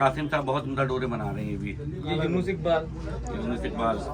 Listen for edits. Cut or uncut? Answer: uncut